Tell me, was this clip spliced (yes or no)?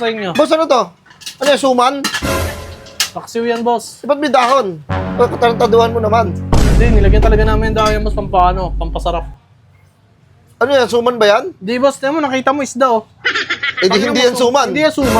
no